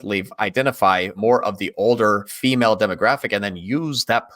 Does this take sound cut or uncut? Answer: cut